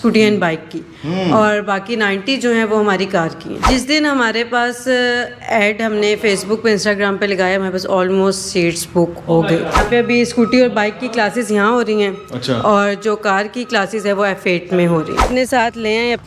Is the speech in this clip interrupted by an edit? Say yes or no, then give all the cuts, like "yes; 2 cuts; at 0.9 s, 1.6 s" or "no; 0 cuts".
yes; 3 cuts; at 3.6 s, 9.8 s, 15.3 s